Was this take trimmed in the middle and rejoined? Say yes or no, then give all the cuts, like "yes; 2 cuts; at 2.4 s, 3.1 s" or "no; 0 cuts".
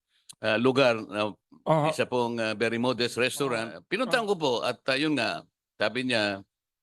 yes; 1 cut; at 3.8 s